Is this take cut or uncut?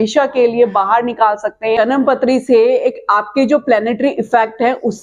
cut